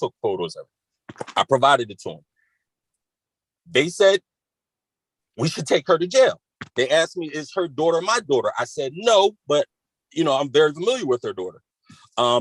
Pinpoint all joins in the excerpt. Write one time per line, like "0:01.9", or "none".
none